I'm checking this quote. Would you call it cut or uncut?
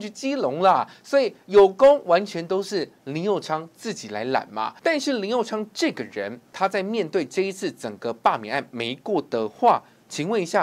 cut